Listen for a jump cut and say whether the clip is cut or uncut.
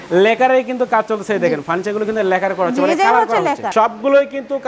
cut